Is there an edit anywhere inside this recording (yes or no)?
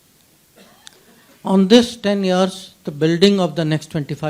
no